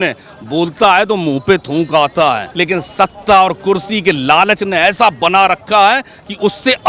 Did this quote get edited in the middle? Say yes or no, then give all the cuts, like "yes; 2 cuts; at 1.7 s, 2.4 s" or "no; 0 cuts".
yes; 1 cut; at 2.5 s